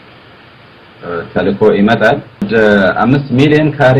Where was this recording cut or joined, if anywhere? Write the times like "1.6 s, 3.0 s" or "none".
2.5 s